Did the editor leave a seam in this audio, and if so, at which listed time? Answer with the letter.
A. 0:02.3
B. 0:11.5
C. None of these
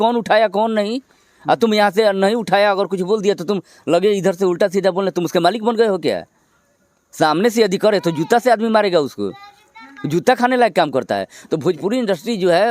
C